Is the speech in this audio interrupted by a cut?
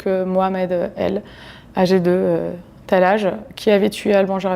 no; 0 cuts

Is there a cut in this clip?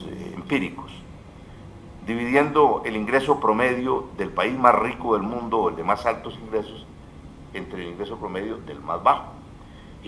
no; 0 cuts

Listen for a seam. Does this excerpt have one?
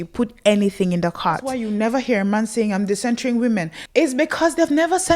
yes; 2 cuts; at 1.5 s, 3.8 s

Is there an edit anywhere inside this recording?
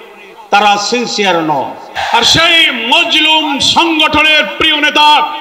yes; 1 cut; at 1.9 s

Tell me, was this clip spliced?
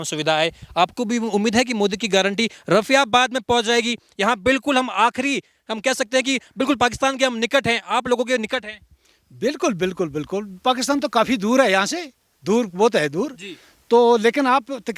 no; 0 cuts

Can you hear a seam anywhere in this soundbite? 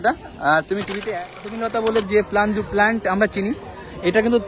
yes; 1 cut; at 1.6 s

